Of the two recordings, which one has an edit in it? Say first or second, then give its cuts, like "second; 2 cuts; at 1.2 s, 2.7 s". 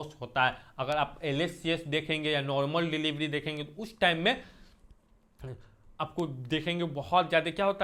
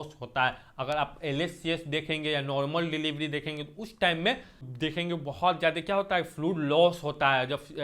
second; 1 cut; at 4.7 s